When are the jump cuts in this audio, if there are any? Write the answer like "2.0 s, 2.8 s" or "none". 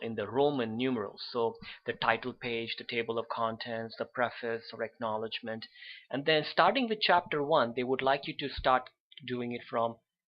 3.9 s